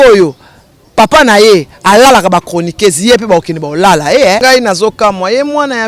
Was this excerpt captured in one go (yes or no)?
no